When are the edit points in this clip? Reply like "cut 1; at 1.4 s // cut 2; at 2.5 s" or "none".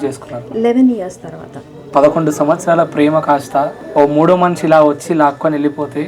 cut 1; at 1.9 s // cut 2; at 3.8 s